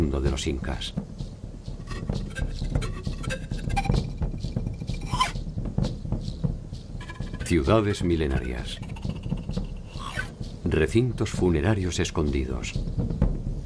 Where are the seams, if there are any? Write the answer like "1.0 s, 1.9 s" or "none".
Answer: 5.7 s